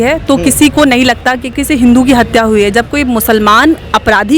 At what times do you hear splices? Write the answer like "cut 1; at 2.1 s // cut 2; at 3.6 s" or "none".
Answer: cut 1; at 1.6 s